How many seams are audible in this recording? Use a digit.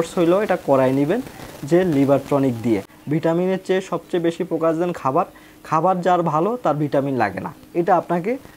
1